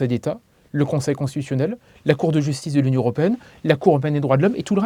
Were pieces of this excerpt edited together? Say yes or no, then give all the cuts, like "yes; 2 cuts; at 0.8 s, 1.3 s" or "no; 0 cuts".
no; 0 cuts